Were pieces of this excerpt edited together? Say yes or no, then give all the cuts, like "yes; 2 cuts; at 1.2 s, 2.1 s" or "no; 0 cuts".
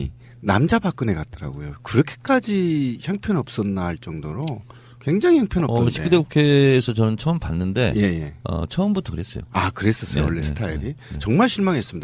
yes; 1 cut; at 9.8 s